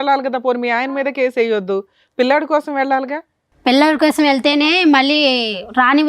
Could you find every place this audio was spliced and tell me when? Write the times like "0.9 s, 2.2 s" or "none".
none